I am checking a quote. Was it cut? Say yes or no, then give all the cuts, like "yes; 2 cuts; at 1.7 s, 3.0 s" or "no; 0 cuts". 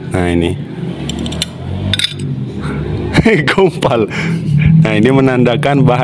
no; 0 cuts